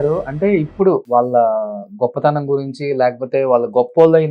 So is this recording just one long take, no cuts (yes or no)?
no